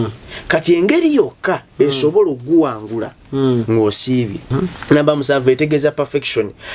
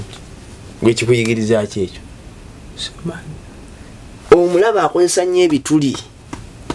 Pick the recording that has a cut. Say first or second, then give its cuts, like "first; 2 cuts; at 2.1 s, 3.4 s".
first; 1 cut; at 4.4 s